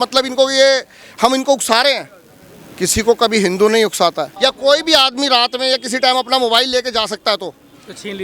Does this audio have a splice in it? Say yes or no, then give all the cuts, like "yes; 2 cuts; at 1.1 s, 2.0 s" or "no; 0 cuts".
yes; 1 cut; at 4.3 s